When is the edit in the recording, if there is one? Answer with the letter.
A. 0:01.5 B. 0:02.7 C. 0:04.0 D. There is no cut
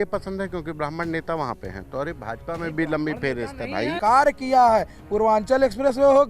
C